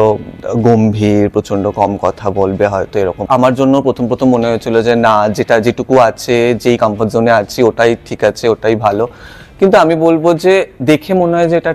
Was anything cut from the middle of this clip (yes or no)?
yes